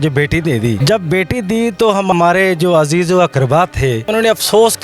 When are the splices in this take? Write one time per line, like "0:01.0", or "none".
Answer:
0:00.8
0:02.1
0:04.1